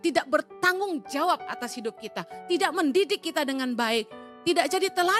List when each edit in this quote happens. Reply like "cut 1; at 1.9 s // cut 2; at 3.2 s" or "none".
none